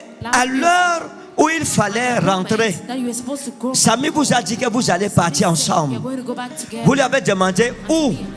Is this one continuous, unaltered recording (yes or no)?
yes